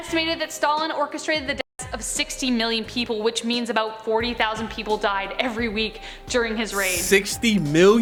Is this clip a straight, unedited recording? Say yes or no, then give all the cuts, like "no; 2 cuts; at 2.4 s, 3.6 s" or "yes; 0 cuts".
yes; 0 cuts